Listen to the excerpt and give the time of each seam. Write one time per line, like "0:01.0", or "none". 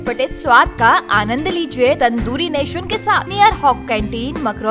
0:02.0
0:03.3